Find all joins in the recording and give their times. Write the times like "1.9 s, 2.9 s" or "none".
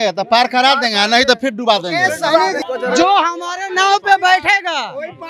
2.6 s